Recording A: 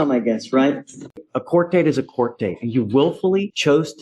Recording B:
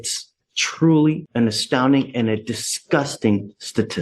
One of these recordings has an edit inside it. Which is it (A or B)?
A